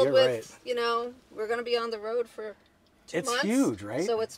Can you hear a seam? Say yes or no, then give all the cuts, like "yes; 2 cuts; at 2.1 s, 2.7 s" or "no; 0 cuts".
no; 0 cuts